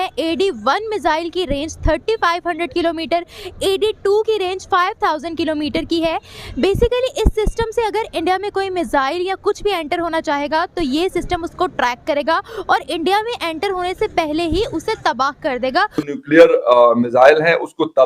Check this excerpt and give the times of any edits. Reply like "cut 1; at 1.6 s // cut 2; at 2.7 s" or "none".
cut 1; at 16.0 s